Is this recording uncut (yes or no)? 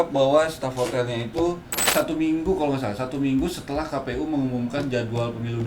no